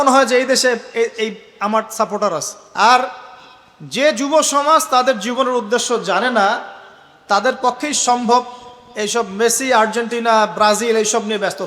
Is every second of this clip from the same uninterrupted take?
no; 1 cut; at 2.6 s

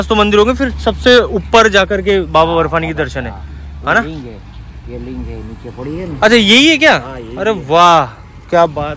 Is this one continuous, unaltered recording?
yes; 0 cuts

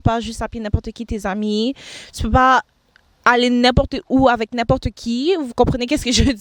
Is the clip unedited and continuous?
yes; 0 cuts

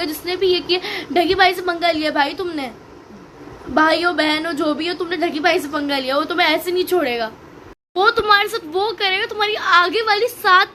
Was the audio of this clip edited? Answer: yes; 1 cut; at 1.1 s

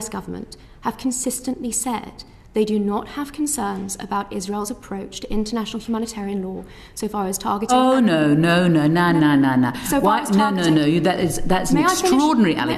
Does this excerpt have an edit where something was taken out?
no; 0 cuts

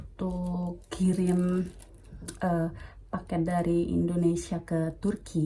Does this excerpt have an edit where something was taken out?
no; 0 cuts

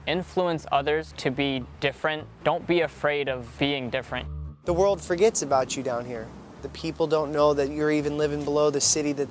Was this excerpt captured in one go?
no; 5 cuts; at 1.1 s, 2.3 s, 3.5 s, 4.3 s, 6.7 s

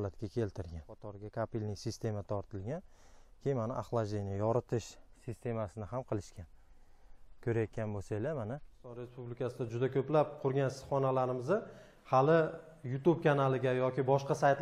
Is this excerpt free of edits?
no; 2 cuts; at 1.1 s, 9.2 s

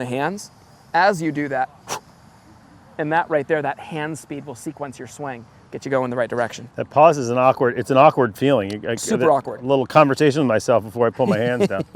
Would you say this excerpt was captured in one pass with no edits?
yes; 0 cuts

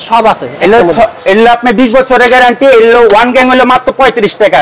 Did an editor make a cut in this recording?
no; 0 cuts

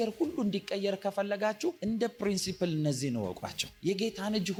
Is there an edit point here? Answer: no; 0 cuts

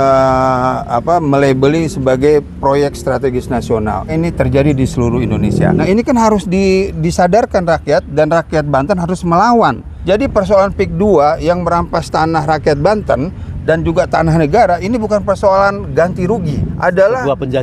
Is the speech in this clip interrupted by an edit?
yes; 4 cuts; at 4.1 s, 5.8 s, 9.9 s, 16.6 s

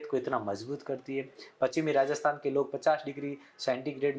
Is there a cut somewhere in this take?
no; 0 cuts

